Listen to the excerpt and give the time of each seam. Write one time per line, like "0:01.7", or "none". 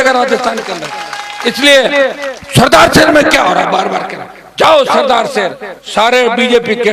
none

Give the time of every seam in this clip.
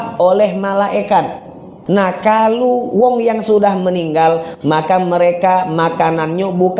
0:01.7

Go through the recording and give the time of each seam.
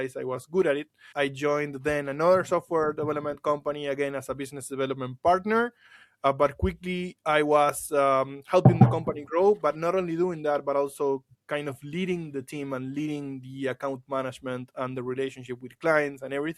none

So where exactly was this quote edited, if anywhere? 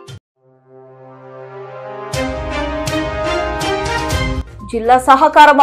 0:04.4

